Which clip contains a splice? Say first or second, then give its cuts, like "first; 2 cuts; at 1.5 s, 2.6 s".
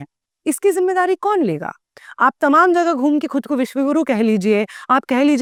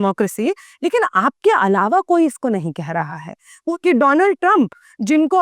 second; 1 cut; at 3.6 s